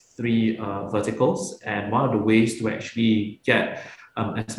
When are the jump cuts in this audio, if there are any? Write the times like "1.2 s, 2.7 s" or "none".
none